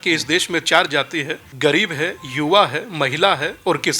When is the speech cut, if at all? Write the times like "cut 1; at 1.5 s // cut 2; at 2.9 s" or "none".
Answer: cut 1; at 1.4 s